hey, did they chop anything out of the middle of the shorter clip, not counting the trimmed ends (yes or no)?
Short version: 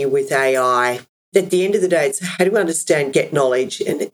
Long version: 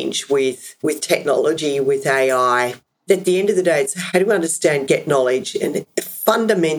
no